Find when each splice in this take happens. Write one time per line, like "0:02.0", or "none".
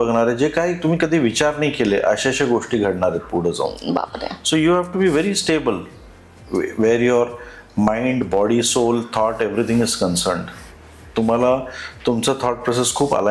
none